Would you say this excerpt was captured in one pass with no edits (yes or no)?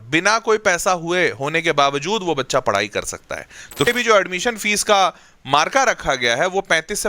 no